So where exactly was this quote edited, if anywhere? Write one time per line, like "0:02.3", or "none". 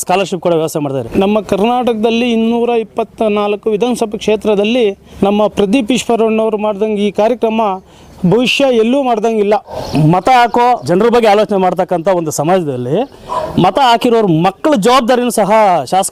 0:01.0
0:05.1
0:09.8
0:10.8